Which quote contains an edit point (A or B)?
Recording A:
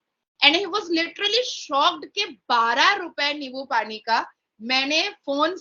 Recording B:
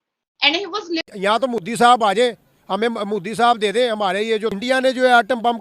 B